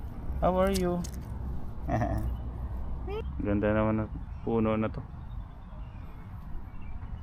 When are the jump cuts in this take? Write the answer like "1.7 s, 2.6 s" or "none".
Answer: 3.2 s